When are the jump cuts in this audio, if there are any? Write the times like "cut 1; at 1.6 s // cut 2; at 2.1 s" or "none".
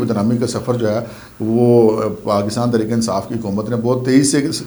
none